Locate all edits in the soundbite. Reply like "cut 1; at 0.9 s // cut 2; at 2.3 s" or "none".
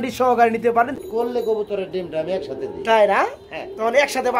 cut 1; at 0.9 s